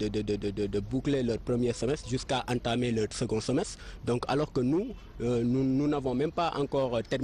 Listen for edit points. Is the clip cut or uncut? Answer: cut